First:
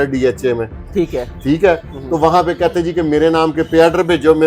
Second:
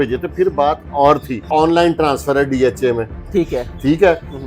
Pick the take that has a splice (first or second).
second